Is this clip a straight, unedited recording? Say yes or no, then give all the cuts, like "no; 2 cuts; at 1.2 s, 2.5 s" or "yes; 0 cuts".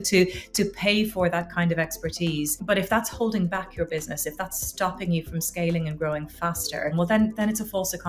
no; 1 cut; at 6.9 s